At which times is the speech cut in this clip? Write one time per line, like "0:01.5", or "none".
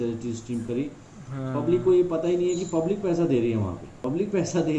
0:03.9

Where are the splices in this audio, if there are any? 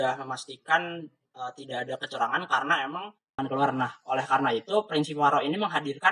0:03.4

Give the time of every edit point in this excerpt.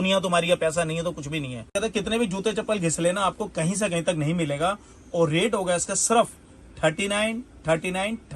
0:01.7

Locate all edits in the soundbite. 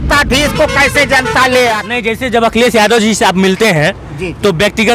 0:01.8

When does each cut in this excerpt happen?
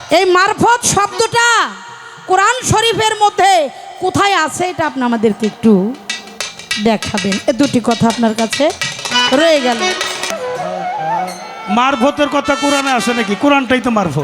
0:10.3

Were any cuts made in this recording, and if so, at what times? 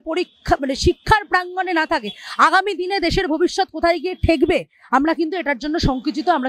none

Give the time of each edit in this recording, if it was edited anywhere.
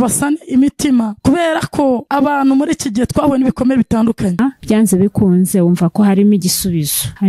0:04.4

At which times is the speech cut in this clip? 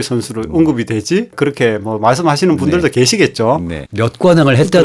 0:03.8

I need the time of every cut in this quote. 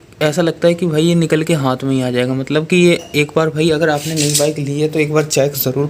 none

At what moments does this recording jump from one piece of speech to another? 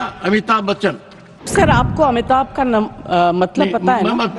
0:01.5

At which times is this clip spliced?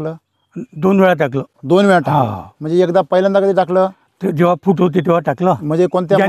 none

